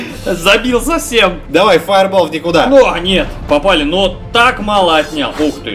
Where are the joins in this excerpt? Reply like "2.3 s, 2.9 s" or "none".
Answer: 1.4 s